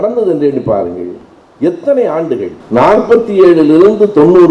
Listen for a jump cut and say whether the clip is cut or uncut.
cut